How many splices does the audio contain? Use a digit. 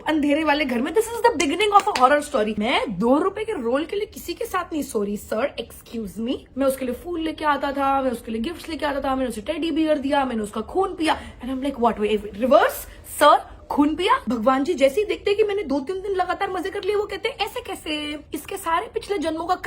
4